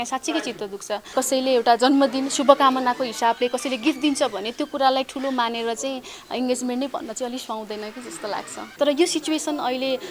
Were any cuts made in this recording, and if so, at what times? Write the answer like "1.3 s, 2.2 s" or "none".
1.1 s, 8.6 s